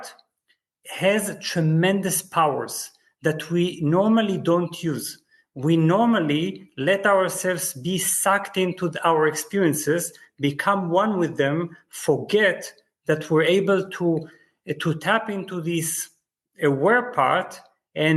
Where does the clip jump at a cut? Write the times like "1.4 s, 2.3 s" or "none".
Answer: none